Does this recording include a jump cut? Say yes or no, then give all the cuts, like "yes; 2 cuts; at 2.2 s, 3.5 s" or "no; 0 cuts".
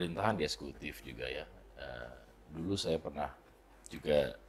no; 0 cuts